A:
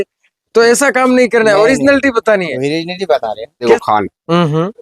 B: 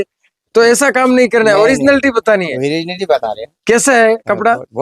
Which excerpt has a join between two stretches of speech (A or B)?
A